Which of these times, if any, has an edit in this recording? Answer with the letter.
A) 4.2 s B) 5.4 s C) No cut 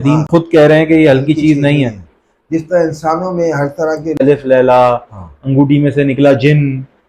A